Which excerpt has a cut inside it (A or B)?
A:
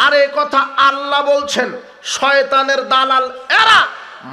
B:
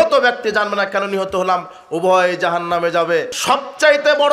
B